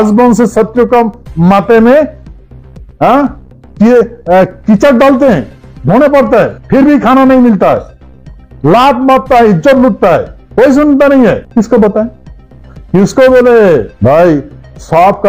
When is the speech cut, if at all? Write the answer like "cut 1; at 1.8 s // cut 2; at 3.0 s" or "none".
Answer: cut 1; at 6.6 s // cut 2; at 10.4 s // cut 3; at 11.5 s // cut 4; at 13.9 s